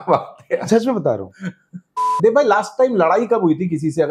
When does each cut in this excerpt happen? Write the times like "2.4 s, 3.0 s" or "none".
2.1 s